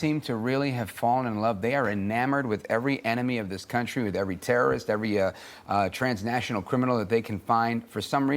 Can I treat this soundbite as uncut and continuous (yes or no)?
yes